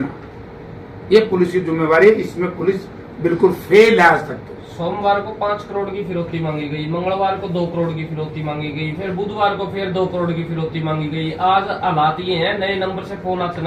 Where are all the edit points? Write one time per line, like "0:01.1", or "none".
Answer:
none